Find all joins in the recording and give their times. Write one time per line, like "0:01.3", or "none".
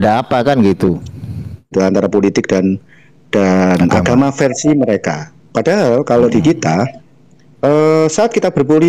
0:01.7